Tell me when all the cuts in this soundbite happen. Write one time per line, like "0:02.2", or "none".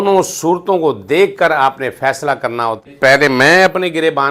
0:02.9